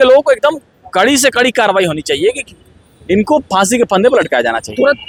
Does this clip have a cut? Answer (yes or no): no